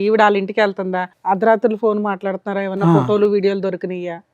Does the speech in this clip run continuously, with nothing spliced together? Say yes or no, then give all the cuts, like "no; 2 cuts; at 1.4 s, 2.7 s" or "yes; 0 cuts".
no; 1 cut; at 1.0 s